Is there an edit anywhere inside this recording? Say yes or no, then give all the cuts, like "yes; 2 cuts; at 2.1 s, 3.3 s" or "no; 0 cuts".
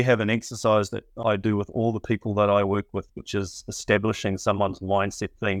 yes; 1 cut; at 1.1 s